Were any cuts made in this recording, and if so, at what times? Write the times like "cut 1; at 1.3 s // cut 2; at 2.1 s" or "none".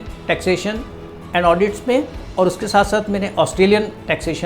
cut 1; at 2.2 s